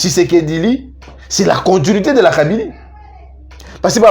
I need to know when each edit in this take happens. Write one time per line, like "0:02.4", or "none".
none